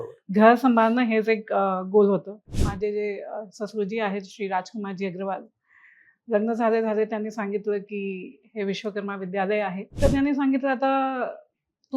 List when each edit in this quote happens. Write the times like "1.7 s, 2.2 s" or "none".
2.6 s, 9.8 s